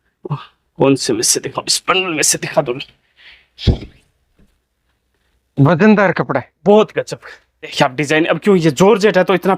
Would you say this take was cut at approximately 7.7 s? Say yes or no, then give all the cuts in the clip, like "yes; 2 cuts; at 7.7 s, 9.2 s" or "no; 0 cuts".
yes; 1 cut; at 7.7 s